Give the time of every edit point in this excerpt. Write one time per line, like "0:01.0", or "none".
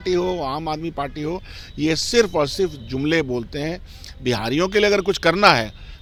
none